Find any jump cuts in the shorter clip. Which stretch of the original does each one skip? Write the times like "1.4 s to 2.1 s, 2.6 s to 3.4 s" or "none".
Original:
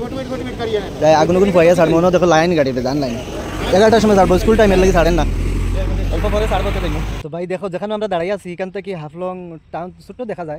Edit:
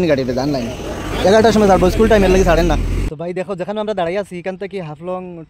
5.6 s to 7.3 s